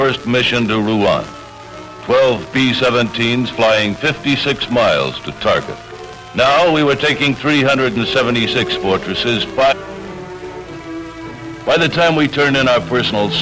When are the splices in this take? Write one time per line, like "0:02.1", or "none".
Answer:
none